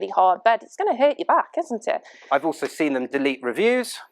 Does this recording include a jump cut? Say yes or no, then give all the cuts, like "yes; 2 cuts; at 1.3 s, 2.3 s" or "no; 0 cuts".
yes; 1 cut; at 2.2 s